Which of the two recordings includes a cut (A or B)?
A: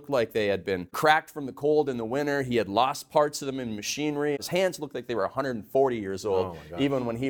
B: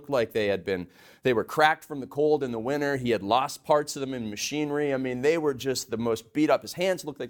A